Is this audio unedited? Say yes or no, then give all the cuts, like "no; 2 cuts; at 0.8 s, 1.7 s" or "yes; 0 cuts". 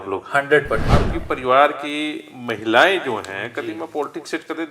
no; 1 cut; at 1.1 s